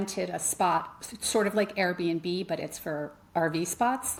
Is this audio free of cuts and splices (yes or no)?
yes